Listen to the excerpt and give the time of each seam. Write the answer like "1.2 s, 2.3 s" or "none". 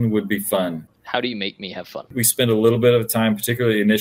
0.9 s, 2.2 s